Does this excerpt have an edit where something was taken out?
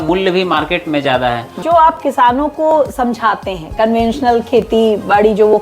yes; 1 cut; at 1.6 s

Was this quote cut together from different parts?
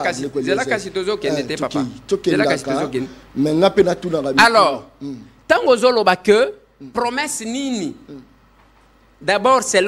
no; 0 cuts

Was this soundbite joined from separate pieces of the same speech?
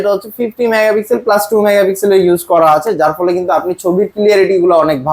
no; 0 cuts

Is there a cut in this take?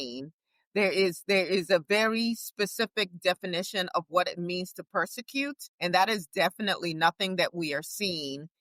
yes; 1 cut; at 5.6 s

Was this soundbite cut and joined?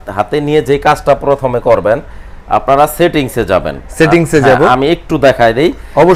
no; 0 cuts

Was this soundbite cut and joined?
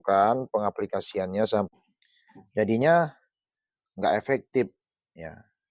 yes; 1 cut; at 1.7 s

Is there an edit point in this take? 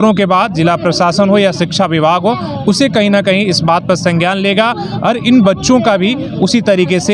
no; 0 cuts

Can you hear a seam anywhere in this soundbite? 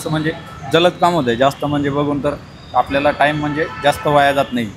no; 0 cuts

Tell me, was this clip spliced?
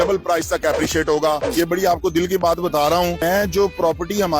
yes; 2 cuts; at 1.4 s, 3.2 s

